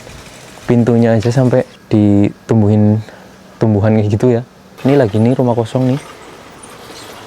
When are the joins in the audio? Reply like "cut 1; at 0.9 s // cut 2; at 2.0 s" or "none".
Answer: cut 1; at 1.8 s // cut 2; at 4.7 s